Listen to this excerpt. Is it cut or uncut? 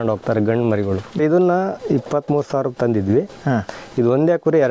cut